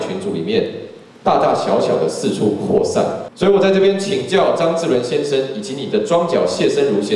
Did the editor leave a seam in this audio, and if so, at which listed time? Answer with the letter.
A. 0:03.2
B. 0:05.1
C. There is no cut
A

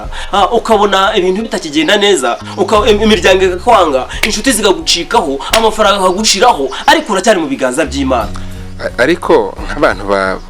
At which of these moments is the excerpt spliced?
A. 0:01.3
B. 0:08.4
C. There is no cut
B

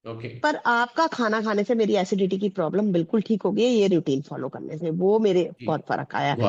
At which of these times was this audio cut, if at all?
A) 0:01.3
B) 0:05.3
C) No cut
C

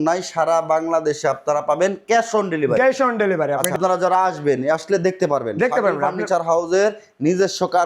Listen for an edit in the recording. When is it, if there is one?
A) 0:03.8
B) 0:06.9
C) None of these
A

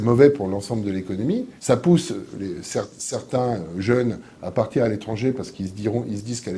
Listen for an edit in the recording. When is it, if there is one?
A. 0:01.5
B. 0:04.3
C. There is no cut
A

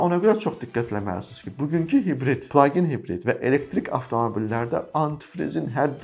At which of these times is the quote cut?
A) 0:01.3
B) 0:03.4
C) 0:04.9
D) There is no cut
D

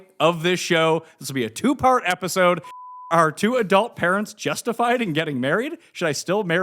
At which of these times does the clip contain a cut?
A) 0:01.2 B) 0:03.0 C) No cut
B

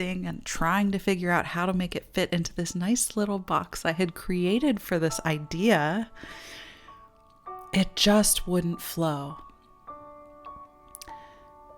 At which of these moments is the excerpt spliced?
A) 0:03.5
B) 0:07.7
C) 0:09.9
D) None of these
D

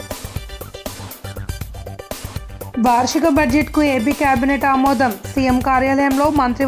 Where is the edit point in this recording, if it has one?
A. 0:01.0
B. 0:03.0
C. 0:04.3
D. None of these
A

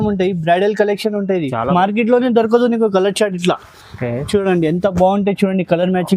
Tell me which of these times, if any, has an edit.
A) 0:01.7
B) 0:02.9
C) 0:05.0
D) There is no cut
A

